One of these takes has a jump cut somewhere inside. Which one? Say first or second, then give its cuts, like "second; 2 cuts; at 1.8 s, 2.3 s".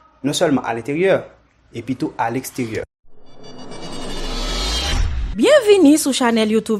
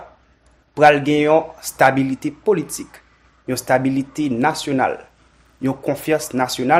first; 1 cut; at 2.8 s